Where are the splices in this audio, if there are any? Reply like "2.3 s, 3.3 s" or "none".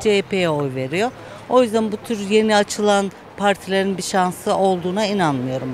none